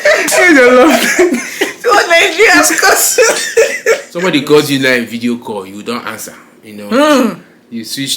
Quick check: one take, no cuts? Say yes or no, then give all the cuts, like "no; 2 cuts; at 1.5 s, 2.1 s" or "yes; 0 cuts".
no; 1 cut; at 4.1 s